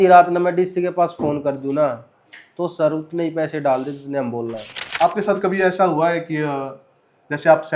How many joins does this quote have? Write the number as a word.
one